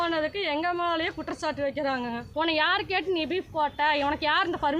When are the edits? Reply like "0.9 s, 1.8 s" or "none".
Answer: 2.2 s